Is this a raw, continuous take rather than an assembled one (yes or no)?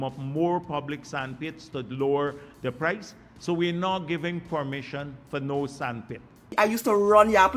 no